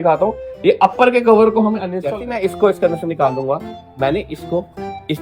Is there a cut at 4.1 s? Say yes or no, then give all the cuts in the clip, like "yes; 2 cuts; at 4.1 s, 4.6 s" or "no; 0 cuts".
no; 1 cut; at 2.0 s